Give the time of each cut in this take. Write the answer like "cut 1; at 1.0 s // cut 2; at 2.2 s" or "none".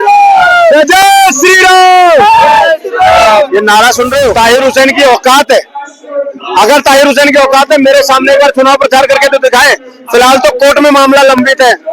cut 1; at 4.3 s